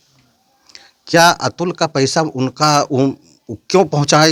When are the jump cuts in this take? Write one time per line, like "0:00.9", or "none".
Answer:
none